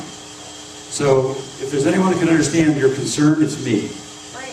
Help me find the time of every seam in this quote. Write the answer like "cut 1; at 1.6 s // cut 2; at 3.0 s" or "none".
none